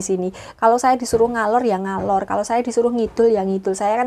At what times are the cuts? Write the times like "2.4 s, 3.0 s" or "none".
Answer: none